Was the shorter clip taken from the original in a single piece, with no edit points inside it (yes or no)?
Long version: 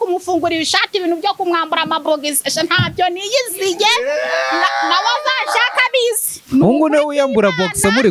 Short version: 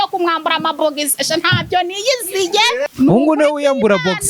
no